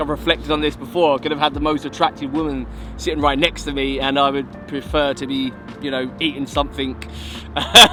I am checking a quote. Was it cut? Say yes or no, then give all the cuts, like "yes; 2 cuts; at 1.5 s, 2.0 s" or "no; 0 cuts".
no; 0 cuts